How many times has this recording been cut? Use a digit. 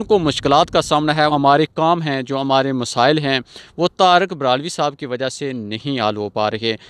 1